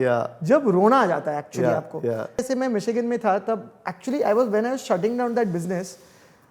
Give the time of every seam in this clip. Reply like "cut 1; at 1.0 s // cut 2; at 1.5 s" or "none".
cut 1; at 2.4 s